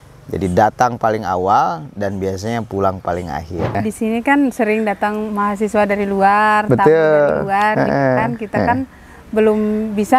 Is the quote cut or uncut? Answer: cut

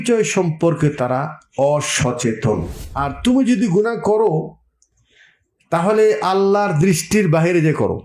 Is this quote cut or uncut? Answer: cut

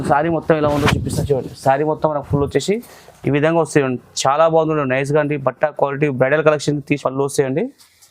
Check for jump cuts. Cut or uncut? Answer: cut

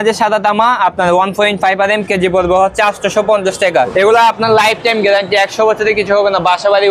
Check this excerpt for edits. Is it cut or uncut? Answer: cut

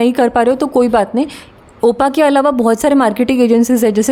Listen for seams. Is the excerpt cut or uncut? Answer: uncut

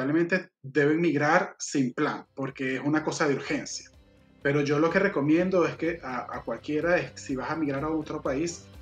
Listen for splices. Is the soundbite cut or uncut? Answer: uncut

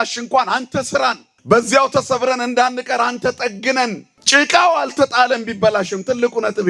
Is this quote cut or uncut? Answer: cut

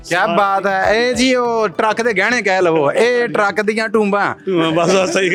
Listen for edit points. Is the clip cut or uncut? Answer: uncut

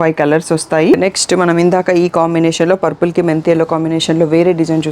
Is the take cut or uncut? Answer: cut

